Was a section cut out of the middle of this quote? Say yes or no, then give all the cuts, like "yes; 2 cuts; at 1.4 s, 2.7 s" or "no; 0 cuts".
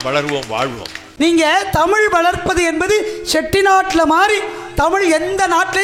yes; 1 cut; at 1.0 s